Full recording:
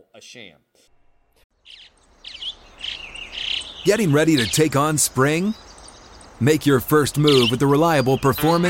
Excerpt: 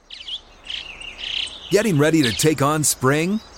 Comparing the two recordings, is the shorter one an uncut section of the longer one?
yes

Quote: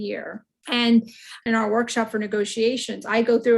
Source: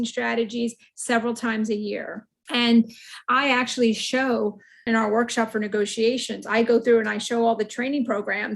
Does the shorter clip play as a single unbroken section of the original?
no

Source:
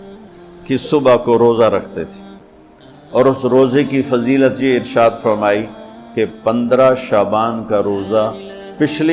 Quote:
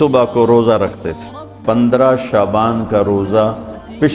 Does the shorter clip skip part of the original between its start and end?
yes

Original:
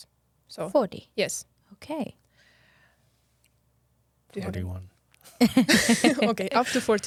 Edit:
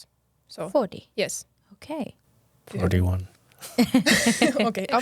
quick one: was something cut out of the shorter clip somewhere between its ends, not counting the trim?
yes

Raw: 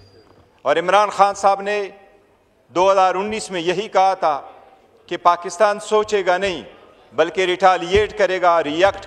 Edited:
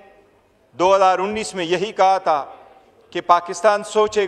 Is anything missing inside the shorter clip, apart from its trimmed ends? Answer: no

